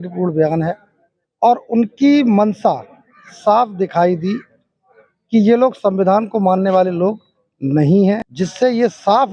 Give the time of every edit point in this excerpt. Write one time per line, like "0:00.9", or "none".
0:08.3